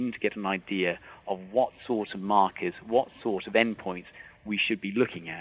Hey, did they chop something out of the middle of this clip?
no; 0 cuts

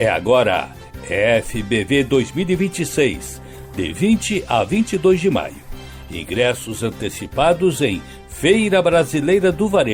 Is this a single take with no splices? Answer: yes; 0 cuts

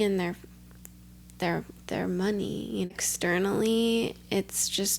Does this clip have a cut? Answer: yes; 1 cut; at 2.9 s

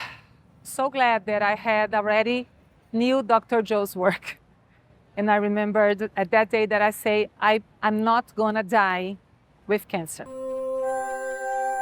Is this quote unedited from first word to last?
no; 1 cut; at 10.3 s

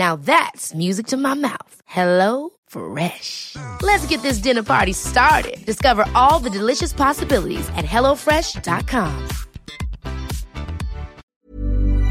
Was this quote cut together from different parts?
yes; 1 cut; at 11.2 s

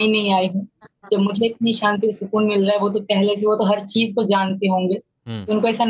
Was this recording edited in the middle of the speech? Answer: no; 0 cuts

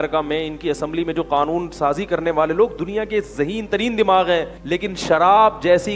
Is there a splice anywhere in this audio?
yes; 1 cut; at 4.5 s

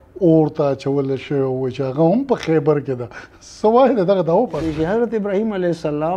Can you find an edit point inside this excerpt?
yes; 1 cut; at 4.7 s

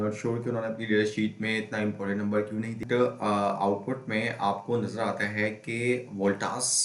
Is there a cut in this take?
yes; 1 cut; at 2.8 s

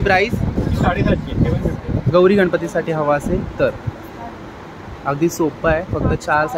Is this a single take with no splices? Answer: no; 1 cut; at 2.0 s

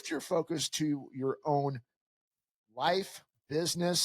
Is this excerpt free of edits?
yes; 0 cuts

